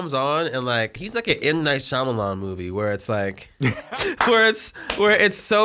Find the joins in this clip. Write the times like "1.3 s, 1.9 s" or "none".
1.0 s, 3.9 s